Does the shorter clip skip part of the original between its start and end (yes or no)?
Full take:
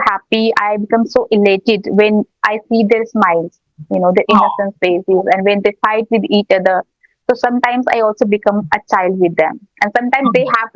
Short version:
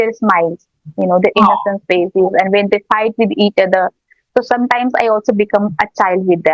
no